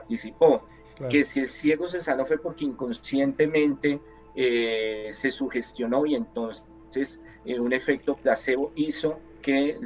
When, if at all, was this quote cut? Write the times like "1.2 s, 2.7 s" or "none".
none